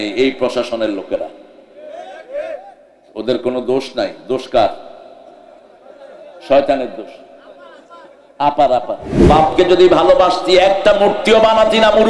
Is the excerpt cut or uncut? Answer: cut